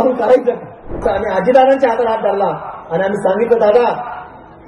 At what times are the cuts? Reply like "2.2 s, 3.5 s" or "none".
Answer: 1.0 s